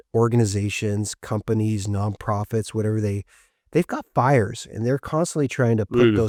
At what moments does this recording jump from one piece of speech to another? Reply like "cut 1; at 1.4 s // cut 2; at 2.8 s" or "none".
none